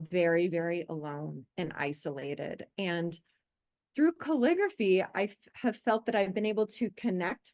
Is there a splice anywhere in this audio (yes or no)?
no